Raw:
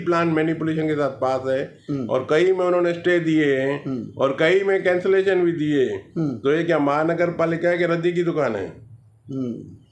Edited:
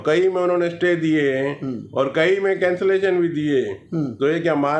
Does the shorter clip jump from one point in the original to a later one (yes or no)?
no